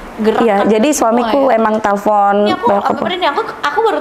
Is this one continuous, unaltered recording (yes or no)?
yes